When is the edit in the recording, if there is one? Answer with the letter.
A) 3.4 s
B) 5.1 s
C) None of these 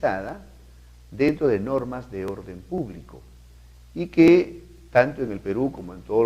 B